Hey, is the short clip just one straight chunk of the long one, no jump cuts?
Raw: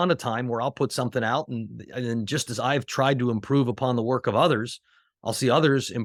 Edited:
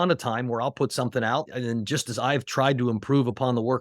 no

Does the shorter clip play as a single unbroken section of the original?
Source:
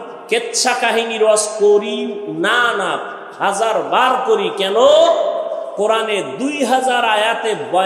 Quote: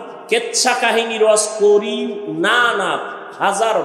yes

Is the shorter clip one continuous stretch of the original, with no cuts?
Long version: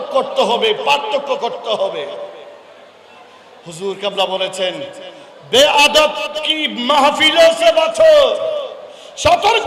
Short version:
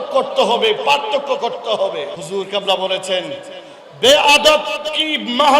no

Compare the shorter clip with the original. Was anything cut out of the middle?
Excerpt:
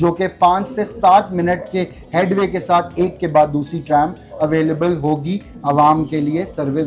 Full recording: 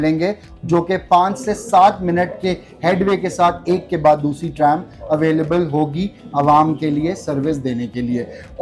no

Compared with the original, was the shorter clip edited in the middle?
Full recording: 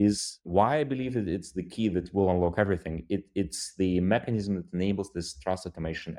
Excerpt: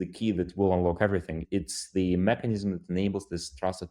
yes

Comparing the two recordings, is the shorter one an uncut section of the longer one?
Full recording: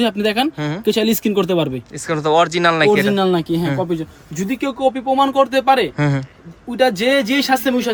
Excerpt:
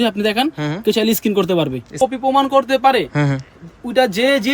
no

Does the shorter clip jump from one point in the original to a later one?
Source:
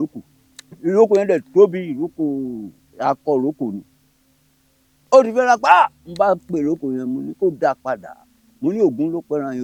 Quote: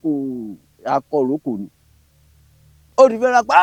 no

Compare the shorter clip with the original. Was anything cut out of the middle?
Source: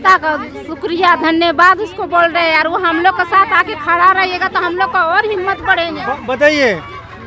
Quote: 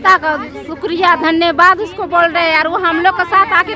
no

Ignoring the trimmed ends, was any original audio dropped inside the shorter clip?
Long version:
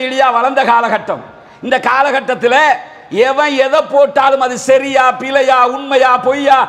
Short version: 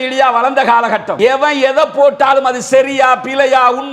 yes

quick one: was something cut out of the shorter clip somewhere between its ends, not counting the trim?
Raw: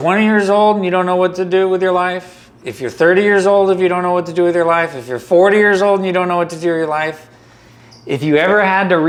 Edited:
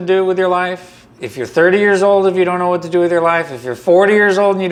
no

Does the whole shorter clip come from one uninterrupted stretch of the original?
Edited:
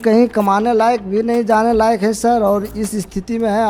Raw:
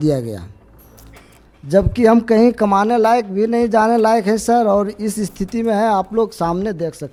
yes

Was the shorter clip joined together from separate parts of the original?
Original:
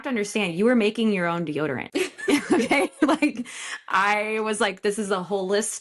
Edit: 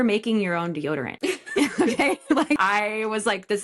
yes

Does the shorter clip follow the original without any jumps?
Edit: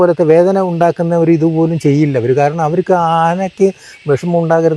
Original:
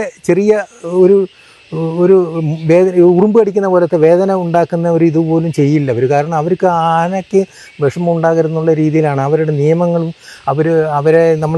yes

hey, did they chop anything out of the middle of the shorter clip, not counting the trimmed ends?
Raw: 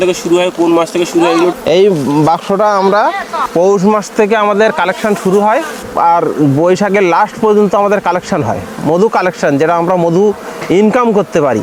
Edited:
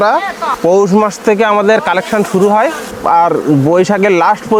no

